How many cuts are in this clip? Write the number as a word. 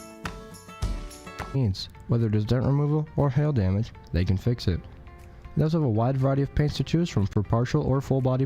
one